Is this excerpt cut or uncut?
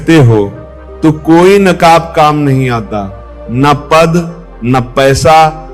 uncut